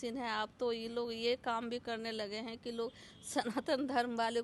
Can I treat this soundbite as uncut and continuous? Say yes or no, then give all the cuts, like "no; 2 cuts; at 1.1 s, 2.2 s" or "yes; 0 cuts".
yes; 0 cuts